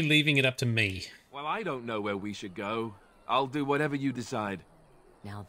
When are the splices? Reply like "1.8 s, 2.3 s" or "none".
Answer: none

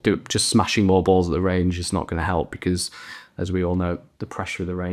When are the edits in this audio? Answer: none

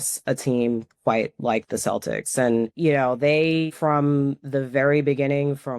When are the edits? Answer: 2.7 s, 3.7 s

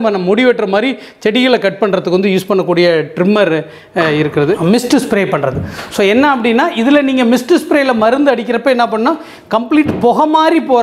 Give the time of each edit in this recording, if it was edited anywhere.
4.6 s

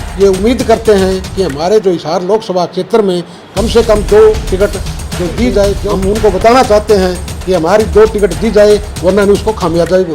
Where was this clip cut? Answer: 5.9 s

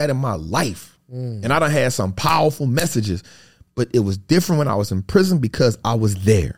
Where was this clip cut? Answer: none

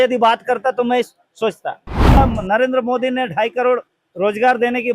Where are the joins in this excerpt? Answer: 2.2 s

